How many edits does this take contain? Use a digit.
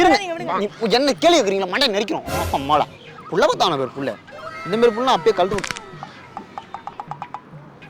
1